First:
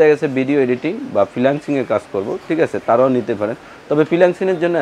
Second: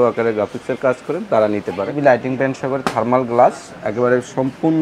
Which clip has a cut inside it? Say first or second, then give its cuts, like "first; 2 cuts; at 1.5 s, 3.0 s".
second; 1 cut; at 1.9 s